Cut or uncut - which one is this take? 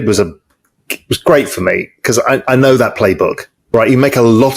cut